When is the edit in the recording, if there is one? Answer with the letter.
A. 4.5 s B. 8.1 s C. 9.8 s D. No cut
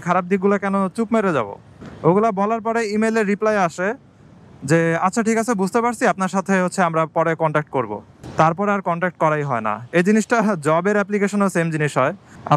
D